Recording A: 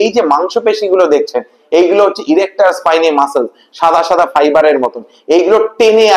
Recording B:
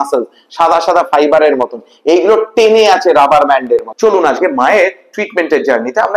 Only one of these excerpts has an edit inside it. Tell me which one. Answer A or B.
B